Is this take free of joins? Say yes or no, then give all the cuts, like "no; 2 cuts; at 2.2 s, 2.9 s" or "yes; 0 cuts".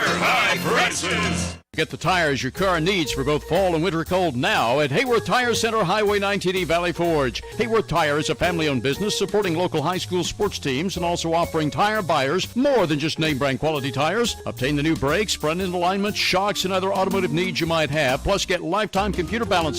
no; 1 cut; at 1.6 s